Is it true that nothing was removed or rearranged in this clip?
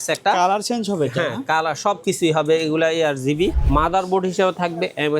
no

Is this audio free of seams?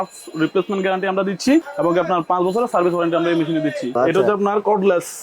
no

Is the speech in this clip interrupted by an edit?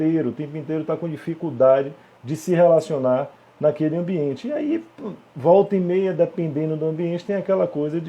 no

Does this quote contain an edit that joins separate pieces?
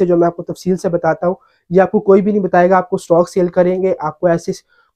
no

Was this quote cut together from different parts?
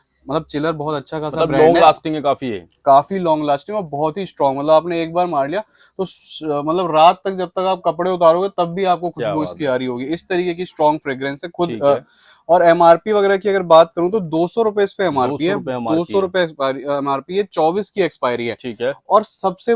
no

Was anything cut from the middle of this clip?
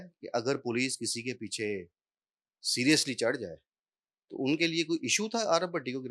no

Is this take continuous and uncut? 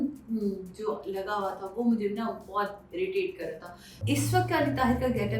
no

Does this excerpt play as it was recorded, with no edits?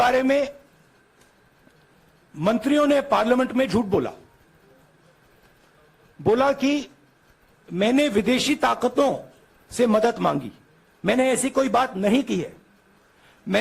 yes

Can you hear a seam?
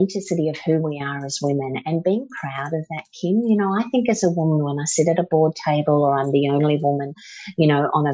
no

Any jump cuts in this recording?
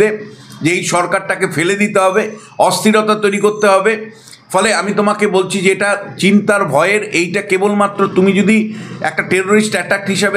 no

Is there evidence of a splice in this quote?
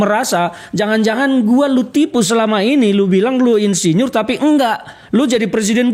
no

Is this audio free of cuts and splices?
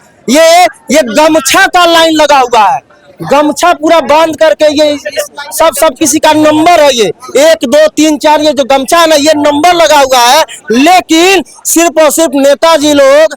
yes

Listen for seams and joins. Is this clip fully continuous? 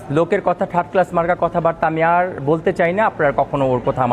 yes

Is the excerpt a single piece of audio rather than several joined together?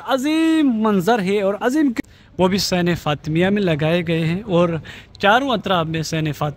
no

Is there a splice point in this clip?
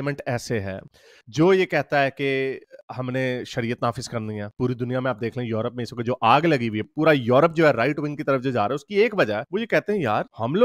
no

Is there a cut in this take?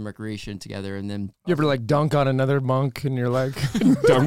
yes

